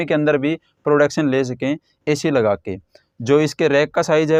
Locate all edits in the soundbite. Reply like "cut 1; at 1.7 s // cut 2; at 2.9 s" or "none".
none